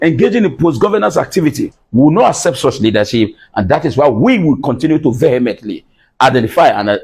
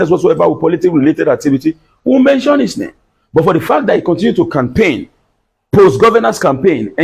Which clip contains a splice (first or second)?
first